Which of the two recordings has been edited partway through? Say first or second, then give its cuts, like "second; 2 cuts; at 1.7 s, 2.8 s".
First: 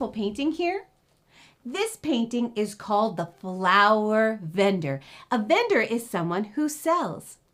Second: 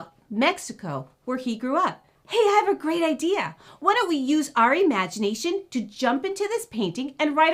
second; 1 cut; at 2.1 s